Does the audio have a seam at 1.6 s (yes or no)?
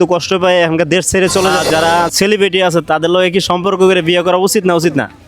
yes